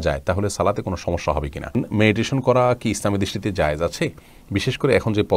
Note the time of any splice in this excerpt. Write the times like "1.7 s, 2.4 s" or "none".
1.8 s